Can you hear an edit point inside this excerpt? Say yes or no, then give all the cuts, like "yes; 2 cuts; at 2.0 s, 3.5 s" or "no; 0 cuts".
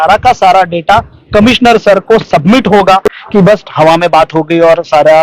yes; 1 cut; at 3.1 s